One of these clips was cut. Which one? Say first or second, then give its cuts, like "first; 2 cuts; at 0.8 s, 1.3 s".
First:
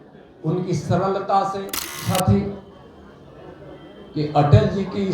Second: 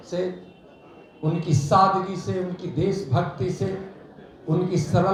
first; 1 cut; at 2.0 s